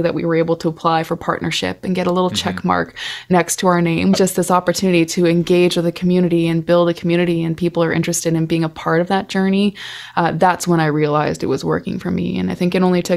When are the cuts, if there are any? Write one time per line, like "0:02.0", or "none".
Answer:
0:04.2